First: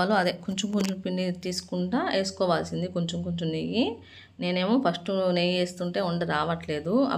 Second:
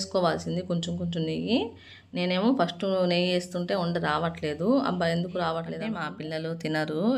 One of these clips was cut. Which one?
second; 1 cut; at 6.1 s

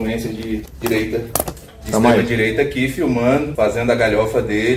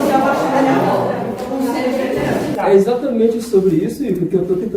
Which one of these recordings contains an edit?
second; 1 cut; at 2.5 s

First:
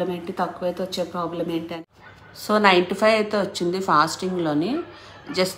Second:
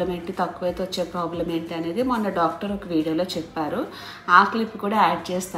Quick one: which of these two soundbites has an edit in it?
first; 1 cut; at 1.8 s

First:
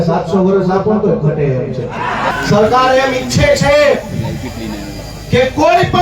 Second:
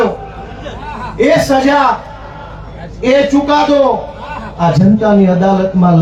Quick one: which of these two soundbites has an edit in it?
first; 1 cut; at 2.3 s

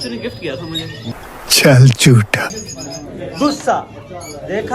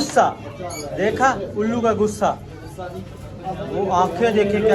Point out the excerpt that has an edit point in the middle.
first; 1 cut; at 2.6 s

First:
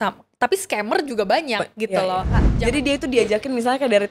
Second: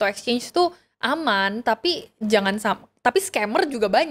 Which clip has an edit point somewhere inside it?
first; 1 cut; at 2.4 s

